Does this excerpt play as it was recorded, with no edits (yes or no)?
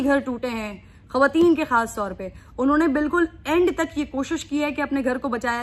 yes